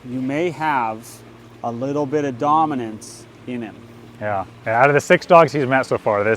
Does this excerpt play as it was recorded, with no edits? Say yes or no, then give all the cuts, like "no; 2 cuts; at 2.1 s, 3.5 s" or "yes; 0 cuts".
no; 1 cut; at 4.5 s